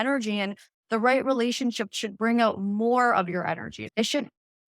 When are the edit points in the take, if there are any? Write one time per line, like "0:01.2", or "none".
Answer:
0:03.8